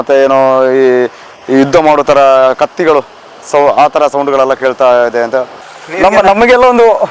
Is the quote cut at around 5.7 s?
yes; 1 cut; at 5.7 s

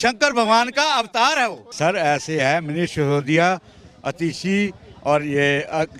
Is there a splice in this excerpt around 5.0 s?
no; 1 cut; at 1.7 s

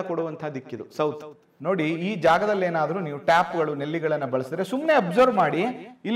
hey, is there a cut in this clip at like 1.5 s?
yes; 1 cut; at 1.5 s

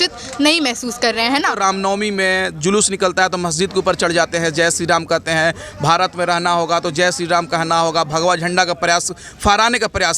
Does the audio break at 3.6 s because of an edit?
no; 1 cut; at 1.6 s

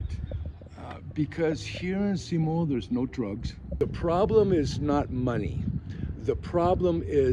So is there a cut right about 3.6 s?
yes; 1 cut; at 3.6 s

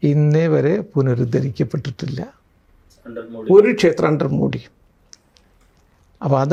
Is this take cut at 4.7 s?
no; 0 cuts

